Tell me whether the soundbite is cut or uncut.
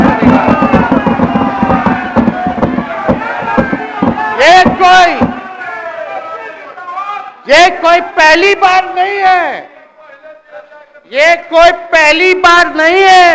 uncut